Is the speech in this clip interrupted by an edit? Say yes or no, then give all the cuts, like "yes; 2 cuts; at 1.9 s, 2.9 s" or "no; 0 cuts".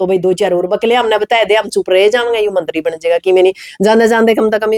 no; 0 cuts